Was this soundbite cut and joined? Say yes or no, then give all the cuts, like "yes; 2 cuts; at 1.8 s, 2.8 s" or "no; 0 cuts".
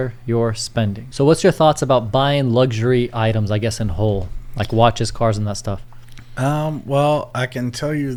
no; 0 cuts